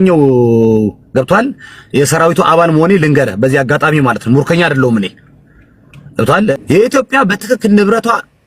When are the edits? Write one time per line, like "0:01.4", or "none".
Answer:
0:06.5